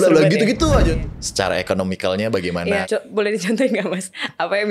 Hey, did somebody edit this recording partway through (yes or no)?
yes